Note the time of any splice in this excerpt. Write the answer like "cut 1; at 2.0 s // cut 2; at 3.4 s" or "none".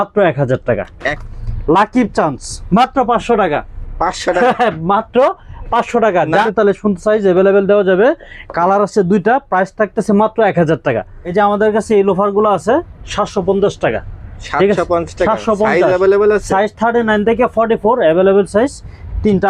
cut 1; at 1.1 s // cut 2; at 6.3 s // cut 3; at 11.2 s